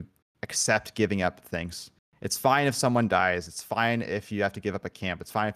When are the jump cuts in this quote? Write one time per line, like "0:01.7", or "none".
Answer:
none